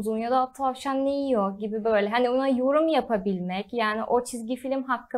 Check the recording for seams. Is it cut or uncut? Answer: uncut